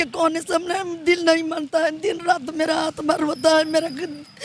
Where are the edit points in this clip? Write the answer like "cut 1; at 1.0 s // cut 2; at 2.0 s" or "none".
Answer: none